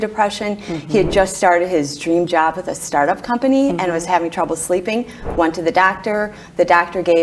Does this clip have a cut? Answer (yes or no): no